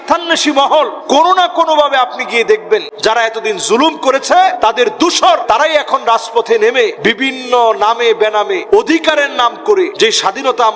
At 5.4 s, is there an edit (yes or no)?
yes